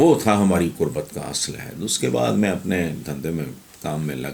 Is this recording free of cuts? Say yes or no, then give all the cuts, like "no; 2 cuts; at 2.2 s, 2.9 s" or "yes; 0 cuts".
yes; 0 cuts